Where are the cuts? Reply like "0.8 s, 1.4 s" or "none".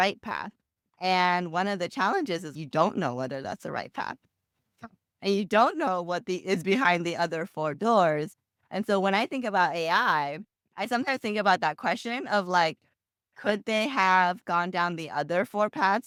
none

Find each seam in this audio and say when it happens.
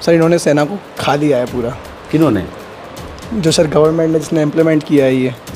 none

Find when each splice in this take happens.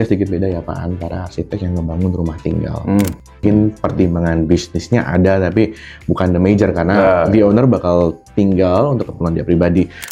none

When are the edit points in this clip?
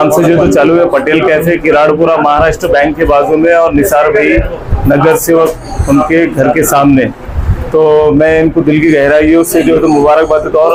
none

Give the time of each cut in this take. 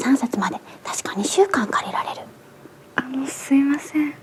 none

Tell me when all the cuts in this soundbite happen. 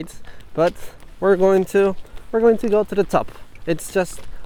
none

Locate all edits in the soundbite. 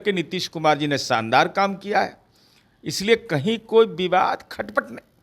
none

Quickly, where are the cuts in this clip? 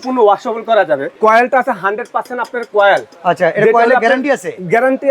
1.2 s

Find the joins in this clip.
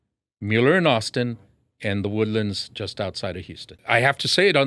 3.6 s

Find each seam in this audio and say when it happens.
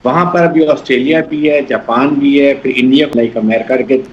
3.1 s

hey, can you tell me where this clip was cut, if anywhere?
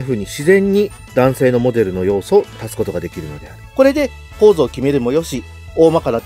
1.0 s, 2.6 s, 3.6 s

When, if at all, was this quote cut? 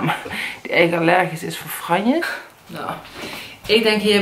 2.4 s

